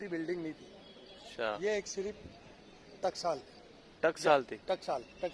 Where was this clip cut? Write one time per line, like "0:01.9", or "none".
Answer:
none